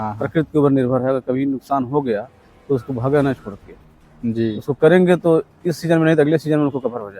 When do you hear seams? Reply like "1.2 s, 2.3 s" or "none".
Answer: none